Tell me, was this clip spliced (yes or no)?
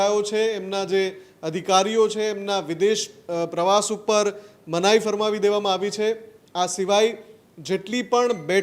no